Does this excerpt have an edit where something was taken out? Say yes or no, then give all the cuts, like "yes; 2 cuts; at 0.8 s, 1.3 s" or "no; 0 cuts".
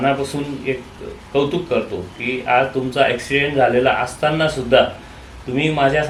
no; 0 cuts